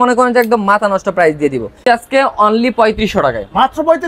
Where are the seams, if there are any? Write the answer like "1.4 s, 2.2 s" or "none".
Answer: 1.8 s